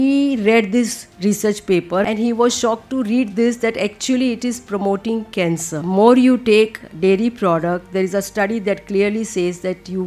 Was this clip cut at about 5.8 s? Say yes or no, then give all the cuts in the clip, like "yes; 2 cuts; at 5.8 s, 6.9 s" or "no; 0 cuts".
yes; 2 cuts; at 2.0 s, 5.8 s